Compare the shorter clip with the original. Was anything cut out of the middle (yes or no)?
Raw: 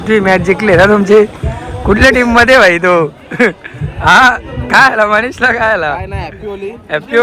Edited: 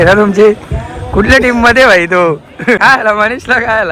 yes